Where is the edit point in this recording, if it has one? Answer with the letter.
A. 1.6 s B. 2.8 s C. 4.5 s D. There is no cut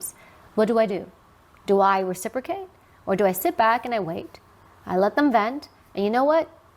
D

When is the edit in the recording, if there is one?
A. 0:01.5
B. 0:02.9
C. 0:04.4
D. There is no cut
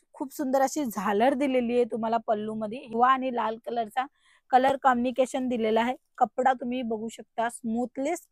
B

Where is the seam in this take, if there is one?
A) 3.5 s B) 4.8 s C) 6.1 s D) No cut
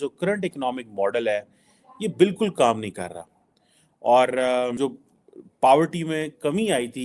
B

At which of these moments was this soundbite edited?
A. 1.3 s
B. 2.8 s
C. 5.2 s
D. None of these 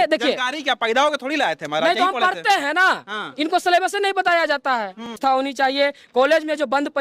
C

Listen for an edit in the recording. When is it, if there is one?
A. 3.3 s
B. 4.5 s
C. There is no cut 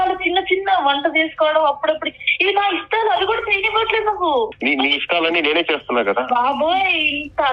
B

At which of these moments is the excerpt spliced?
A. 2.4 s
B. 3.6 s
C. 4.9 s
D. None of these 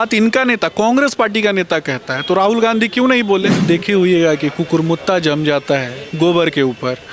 B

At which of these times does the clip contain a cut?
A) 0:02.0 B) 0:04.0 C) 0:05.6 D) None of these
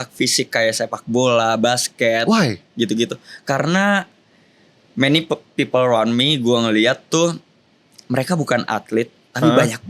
D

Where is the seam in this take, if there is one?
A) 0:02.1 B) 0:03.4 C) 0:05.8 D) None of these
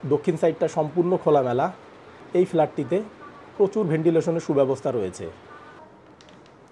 C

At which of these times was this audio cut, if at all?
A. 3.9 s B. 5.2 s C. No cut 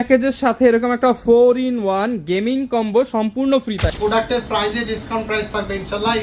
A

